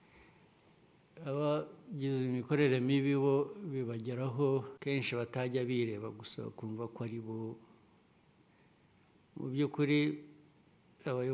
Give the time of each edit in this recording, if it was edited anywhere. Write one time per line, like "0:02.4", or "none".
0:04.7